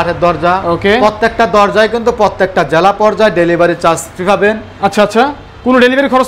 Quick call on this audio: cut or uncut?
uncut